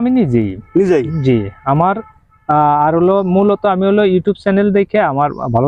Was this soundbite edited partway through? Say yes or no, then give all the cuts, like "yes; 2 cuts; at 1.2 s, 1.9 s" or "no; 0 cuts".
no; 0 cuts